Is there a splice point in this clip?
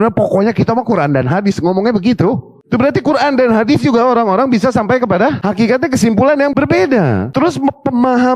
yes; 3 cuts; at 5.4 s, 6.5 s, 7.3 s

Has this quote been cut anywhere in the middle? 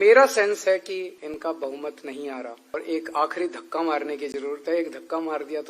yes; 2 cuts; at 1.2 s, 2.7 s

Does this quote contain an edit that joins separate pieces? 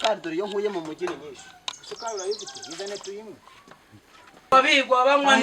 yes; 1 cut; at 4.5 s

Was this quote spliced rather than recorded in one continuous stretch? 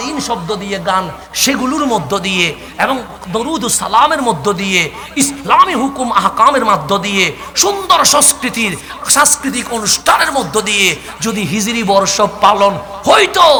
no; 0 cuts

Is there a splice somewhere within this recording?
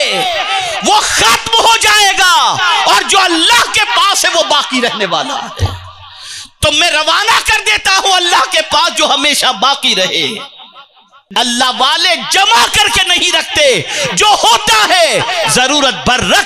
yes; 1 cut; at 11.2 s

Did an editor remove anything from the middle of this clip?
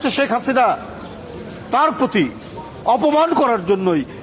no; 0 cuts

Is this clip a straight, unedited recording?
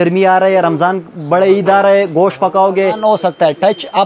no; 1 cut; at 3.0 s

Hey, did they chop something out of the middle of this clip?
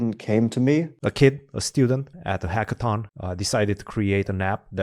yes; 3 cuts; at 1.0 s, 2.1 s, 3.1 s

